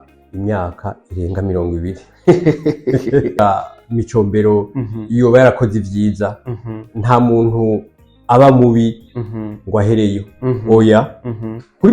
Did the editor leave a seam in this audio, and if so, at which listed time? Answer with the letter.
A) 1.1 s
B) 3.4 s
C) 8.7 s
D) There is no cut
B